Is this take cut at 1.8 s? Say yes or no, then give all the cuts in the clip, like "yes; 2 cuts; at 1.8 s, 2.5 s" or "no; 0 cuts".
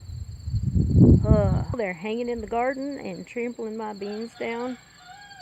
yes; 1 cut; at 1.8 s